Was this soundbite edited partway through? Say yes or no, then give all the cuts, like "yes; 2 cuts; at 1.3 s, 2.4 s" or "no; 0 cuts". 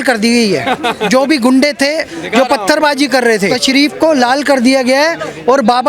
yes; 1 cut; at 3.6 s